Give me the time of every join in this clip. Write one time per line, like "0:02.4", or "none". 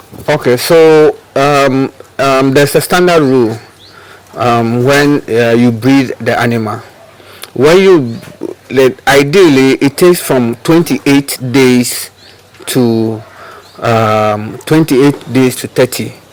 none